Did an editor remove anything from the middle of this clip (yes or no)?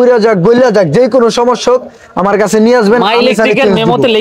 no